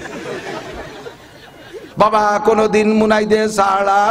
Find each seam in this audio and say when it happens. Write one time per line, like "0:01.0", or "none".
0:01.8